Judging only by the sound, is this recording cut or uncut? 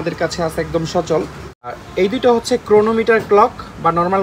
cut